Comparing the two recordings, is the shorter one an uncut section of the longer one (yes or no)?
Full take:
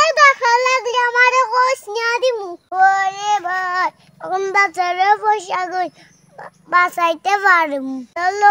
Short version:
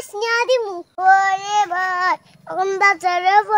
yes